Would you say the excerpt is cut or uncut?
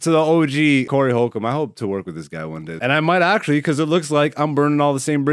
cut